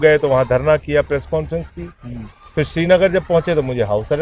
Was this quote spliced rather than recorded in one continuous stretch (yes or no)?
no